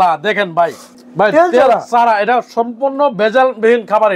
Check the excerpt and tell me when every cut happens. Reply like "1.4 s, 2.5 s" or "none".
0.9 s